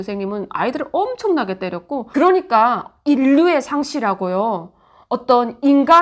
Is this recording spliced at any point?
yes; 1 cut; at 2.1 s

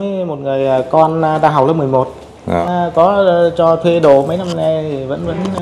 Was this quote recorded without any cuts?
no; 1 cut; at 2.6 s

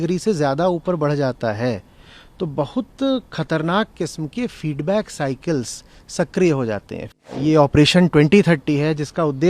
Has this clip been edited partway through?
yes; 1 cut; at 7.0 s

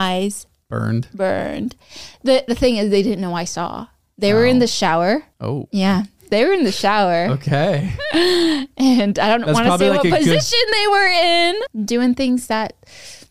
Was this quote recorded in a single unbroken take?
no; 1 cut; at 11.6 s

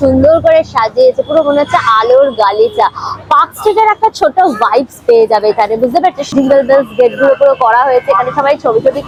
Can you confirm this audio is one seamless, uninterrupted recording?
yes; 0 cuts

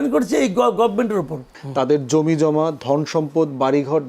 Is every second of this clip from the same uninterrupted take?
no; 1 cut; at 1.5 s

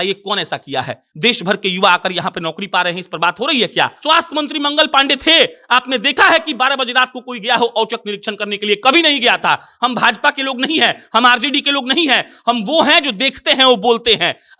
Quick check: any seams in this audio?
yes; 1 cut; at 4.0 s

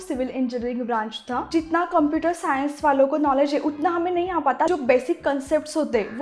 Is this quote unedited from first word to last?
no; 2 cuts; at 1.5 s, 4.7 s

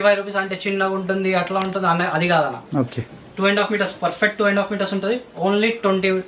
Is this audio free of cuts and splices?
yes; 0 cuts

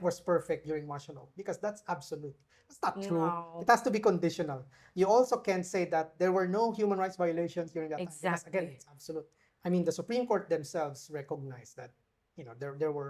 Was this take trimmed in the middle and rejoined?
no; 0 cuts

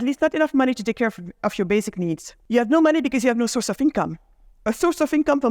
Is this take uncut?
no; 1 cut; at 2.3 s

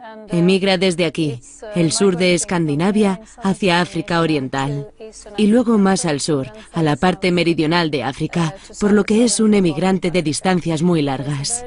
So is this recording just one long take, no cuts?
no; 1 cut; at 10.4 s

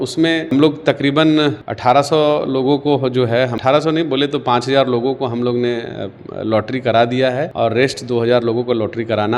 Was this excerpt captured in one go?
yes; 0 cuts

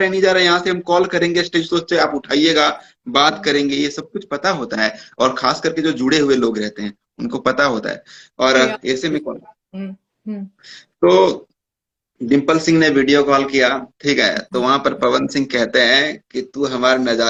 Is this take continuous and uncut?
yes; 0 cuts

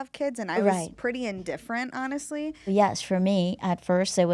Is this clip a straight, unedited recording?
no; 1 cut; at 2.7 s

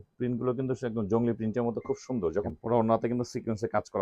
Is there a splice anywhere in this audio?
yes; 1 cut; at 2.5 s

